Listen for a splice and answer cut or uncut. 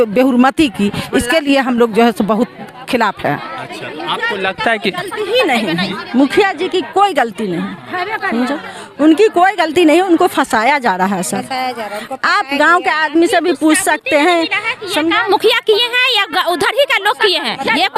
uncut